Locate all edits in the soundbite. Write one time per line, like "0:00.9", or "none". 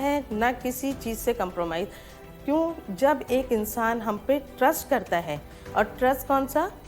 none

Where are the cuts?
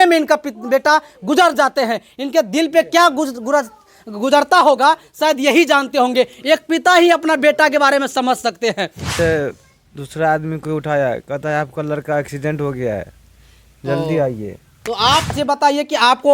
0:09.1
0:15.3

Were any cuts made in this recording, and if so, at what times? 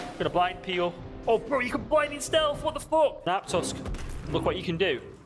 0:03.2

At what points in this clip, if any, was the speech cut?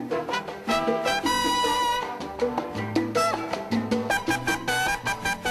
0:04.0

